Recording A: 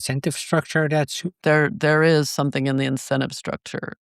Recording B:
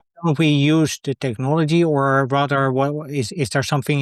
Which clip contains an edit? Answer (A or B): A